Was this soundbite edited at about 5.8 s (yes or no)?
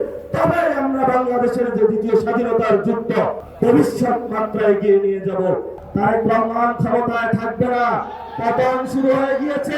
yes